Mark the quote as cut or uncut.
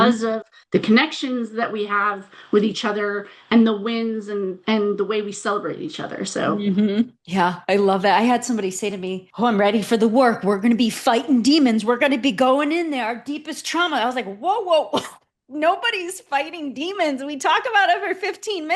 uncut